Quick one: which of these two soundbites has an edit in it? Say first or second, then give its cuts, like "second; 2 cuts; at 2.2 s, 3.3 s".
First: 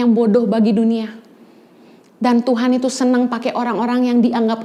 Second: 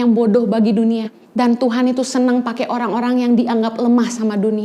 second; 1 cut; at 1.2 s